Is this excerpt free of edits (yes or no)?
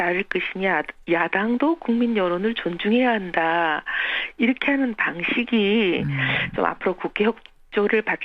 yes